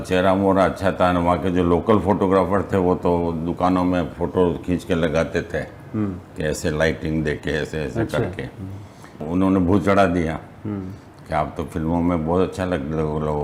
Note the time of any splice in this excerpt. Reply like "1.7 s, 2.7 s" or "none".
none